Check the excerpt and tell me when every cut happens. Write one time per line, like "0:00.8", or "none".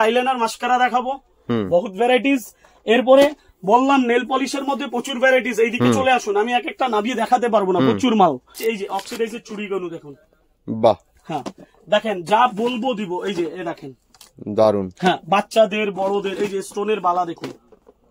0:08.5